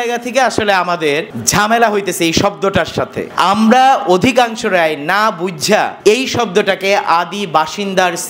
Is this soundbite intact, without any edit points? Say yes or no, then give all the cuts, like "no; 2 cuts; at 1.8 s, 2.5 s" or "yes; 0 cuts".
no; 3 cuts; at 1.4 s, 3.2 s, 5.9 s